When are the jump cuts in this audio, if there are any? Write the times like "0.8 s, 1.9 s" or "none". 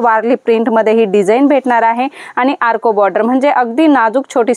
none